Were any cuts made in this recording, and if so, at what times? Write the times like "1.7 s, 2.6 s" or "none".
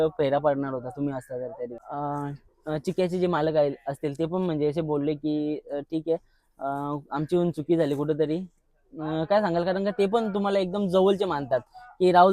1.8 s